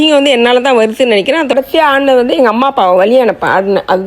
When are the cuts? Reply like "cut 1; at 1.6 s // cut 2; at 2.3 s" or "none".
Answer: cut 1; at 1.5 s